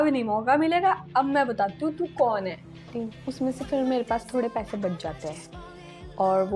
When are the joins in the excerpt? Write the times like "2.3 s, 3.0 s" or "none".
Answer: 2.9 s